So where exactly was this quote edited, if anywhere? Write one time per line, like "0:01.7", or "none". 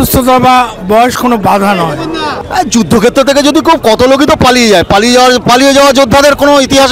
0:02.4